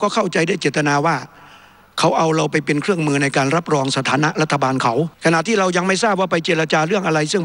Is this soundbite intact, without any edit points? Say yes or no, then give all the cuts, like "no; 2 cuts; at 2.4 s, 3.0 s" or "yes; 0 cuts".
no; 1 cut; at 5.1 s